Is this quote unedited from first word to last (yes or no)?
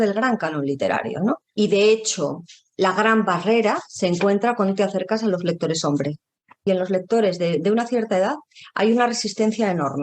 no